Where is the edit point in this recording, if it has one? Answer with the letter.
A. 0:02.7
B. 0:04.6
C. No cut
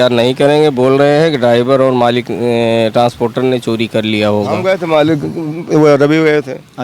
B